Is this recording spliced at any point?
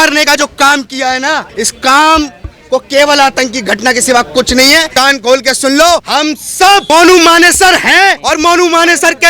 yes; 4 cuts; at 1.5 s, 4.9 s, 6.3 s, 8.2 s

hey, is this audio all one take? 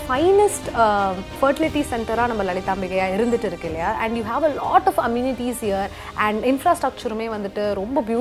yes; 0 cuts

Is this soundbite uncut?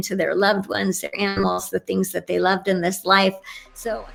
yes; 0 cuts

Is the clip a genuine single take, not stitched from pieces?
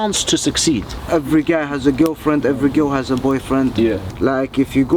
no; 2 cuts; at 1.0 s, 4.1 s

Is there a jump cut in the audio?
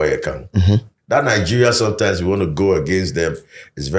yes; 1 cut; at 0.9 s

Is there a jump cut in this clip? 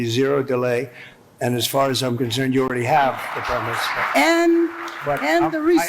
no; 0 cuts

